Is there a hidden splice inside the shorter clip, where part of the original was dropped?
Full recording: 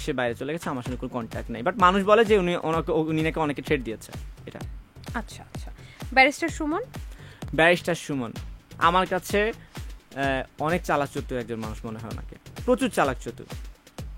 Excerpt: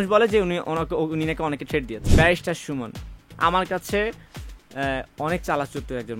yes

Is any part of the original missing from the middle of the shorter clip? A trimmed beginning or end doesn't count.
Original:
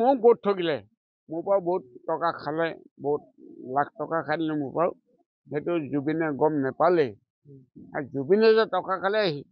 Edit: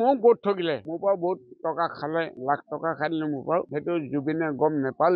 yes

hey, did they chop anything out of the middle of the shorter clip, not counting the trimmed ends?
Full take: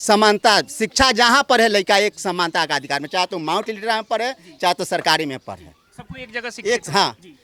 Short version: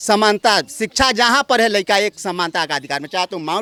no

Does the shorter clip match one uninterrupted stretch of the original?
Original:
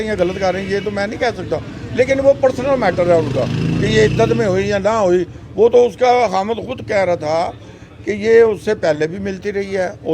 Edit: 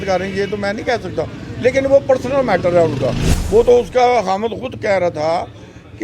no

